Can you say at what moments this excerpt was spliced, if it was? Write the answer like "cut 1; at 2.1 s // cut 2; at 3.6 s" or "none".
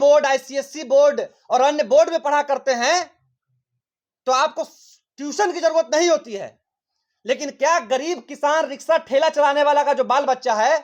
none